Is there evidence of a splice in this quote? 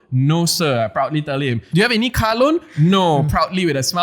yes; 1 cut; at 1.6 s

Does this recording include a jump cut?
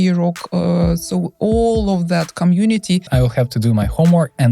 yes; 1 cut; at 3.1 s

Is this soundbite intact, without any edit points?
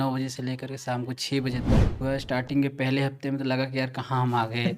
no; 1 cut; at 2.0 s

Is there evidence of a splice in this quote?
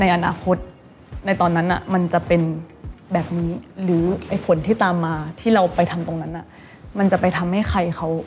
no; 0 cuts

